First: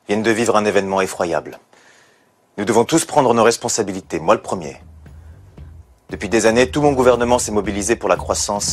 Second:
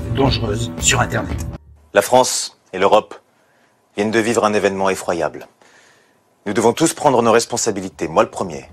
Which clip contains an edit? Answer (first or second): second